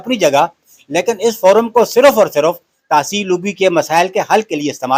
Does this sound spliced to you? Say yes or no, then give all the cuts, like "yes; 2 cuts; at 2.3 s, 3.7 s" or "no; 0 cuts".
no; 0 cuts